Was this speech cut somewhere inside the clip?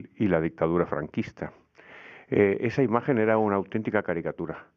no; 0 cuts

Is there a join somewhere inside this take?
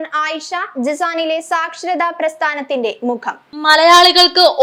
no; 0 cuts

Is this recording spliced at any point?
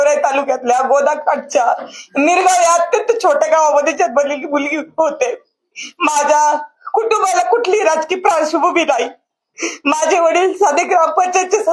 no; 0 cuts

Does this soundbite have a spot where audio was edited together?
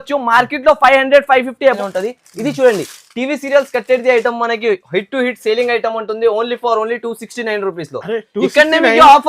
yes; 1 cut; at 1.8 s

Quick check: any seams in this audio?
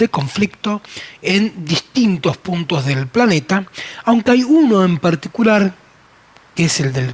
no; 0 cuts

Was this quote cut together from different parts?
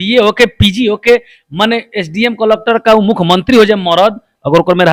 no; 0 cuts

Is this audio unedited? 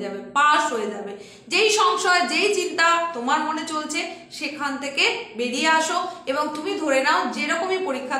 yes; 0 cuts

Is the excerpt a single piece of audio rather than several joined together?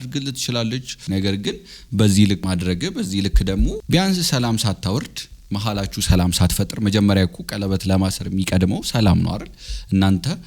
no; 2 cuts; at 0.9 s, 2.4 s

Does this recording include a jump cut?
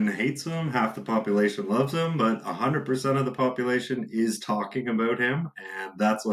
no; 0 cuts

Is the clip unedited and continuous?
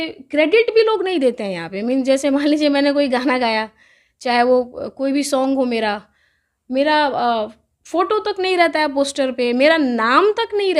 yes; 0 cuts

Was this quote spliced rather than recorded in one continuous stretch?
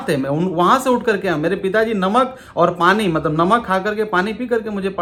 no; 0 cuts

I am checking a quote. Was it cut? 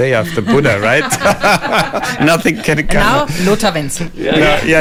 no; 0 cuts

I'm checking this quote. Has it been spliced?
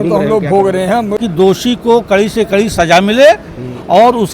yes; 1 cut; at 1.2 s

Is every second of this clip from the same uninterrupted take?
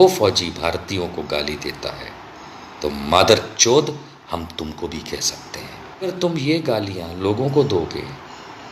no; 1 cut; at 6.1 s

